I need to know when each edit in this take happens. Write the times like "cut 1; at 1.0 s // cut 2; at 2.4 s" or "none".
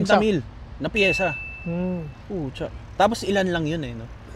none